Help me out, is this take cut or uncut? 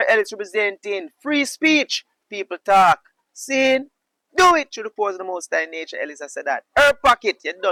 uncut